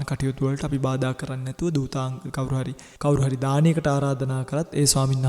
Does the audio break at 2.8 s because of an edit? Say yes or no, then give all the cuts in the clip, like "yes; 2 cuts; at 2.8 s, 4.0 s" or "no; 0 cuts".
yes; 1 cut; at 2.8 s